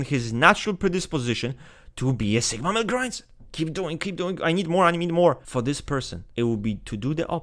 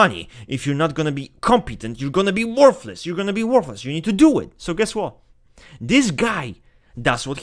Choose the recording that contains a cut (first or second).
first